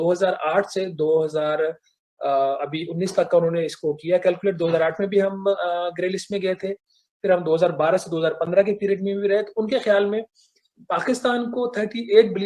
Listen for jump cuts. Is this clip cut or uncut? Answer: uncut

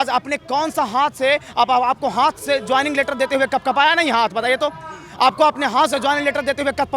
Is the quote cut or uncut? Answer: uncut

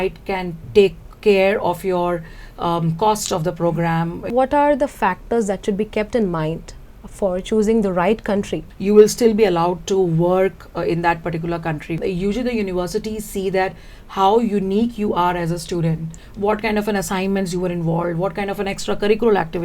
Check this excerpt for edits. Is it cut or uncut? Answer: cut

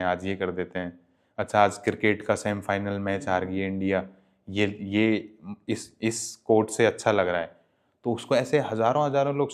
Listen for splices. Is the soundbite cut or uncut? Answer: uncut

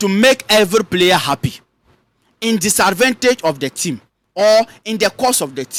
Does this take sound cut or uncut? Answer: uncut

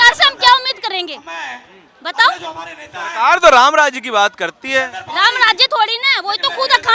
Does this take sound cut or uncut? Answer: uncut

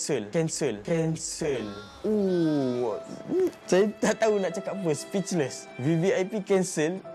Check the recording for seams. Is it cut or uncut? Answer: uncut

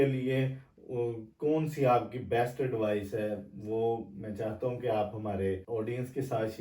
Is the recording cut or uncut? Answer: cut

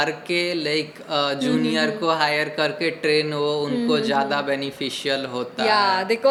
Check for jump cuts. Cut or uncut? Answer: uncut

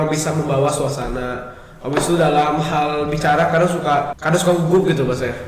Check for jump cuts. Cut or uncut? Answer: cut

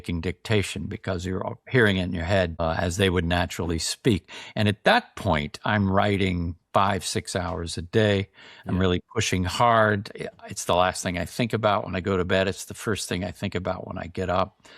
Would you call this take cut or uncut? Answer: cut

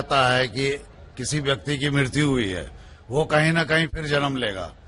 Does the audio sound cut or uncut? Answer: uncut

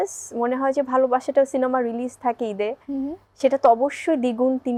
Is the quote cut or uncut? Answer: uncut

